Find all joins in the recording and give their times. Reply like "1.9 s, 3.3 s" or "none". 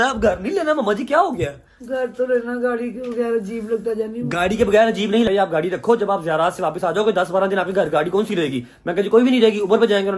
none